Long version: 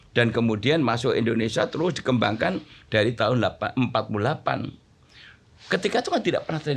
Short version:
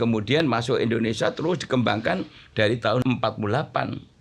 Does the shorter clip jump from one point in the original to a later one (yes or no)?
yes